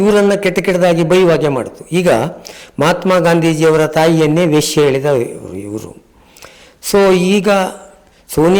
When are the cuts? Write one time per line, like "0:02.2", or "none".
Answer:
none